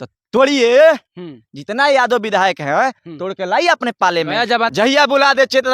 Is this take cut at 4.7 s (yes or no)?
yes